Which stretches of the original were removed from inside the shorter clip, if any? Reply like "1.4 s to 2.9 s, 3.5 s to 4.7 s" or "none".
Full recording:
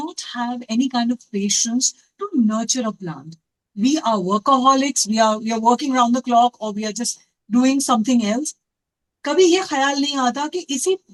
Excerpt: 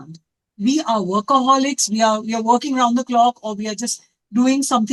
none